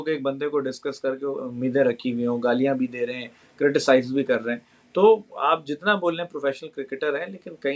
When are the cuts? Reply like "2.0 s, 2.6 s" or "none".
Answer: none

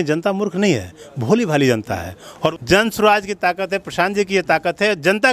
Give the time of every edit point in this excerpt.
2.5 s

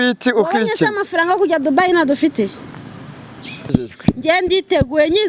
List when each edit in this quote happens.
3.6 s

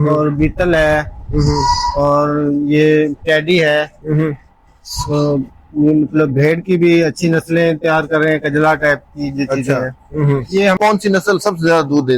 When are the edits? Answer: 10.8 s

